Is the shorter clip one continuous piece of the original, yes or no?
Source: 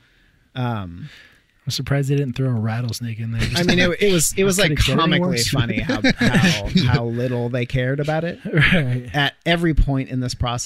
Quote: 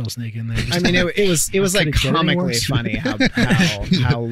yes